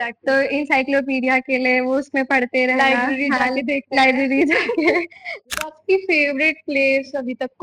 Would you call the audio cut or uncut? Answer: cut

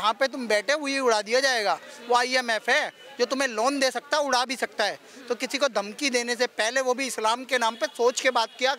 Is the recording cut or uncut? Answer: uncut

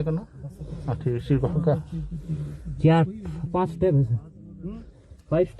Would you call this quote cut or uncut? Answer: uncut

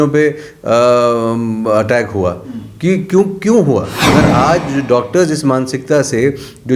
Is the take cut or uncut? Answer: cut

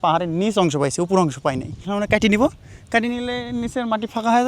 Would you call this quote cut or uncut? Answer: cut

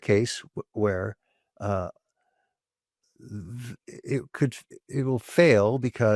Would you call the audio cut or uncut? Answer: uncut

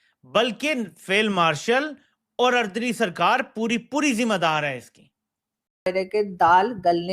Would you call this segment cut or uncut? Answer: cut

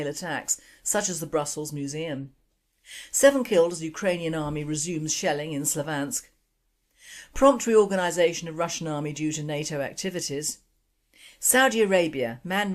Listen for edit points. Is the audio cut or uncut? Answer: cut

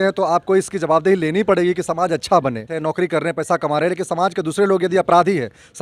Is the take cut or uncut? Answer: cut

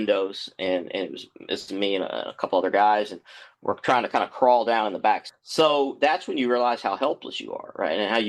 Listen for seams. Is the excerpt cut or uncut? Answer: cut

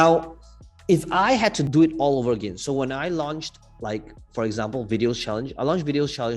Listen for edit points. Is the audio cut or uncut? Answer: cut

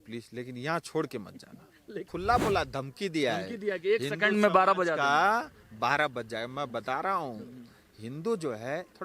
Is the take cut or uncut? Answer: cut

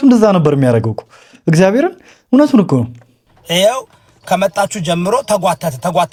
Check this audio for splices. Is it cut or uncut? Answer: uncut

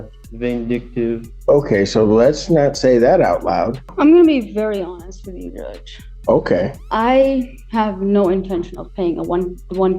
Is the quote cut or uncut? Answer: cut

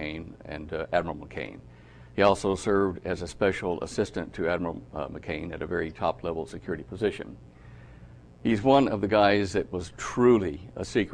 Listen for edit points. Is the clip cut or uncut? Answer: cut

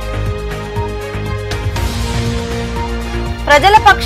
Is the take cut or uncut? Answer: cut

